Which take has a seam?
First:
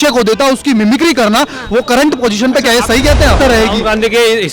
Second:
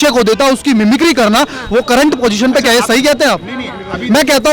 first; 1 cut; at 3.4 s

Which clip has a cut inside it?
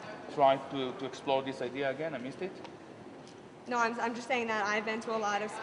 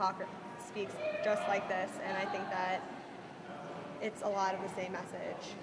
second; 1 cut; at 1.2 s

